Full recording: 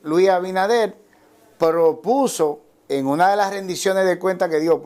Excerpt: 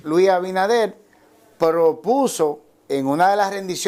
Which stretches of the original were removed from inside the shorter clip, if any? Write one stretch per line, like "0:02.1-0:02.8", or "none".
none